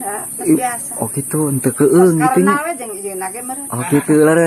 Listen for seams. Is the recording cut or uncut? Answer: uncut